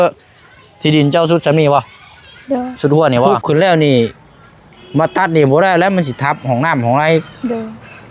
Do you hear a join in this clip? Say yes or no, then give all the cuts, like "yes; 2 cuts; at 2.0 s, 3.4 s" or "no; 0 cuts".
yes; 1 cut; at 3.4 s